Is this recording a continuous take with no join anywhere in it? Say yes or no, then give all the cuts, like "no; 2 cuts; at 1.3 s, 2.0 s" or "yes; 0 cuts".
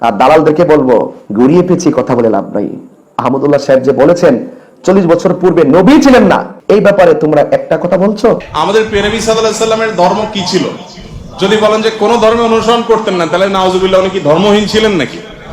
no; 3 cuts; at 1.2 s, 6.5 s, 8.5 s